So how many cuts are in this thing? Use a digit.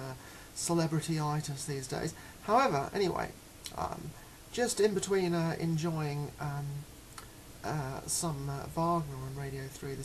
1